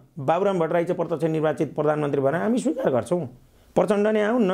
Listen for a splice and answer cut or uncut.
uncut